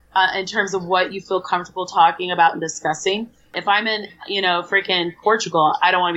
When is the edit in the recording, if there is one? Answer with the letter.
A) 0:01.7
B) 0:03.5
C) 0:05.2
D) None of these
B